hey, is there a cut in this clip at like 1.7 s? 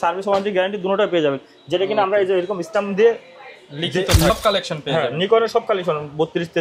no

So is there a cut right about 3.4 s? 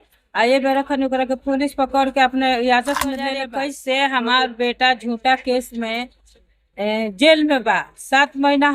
yes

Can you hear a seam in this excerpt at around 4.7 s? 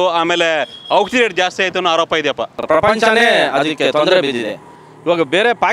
no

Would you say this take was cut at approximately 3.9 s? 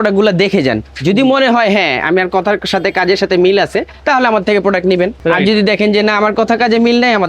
yes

